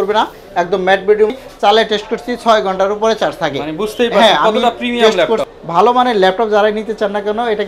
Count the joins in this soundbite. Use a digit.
2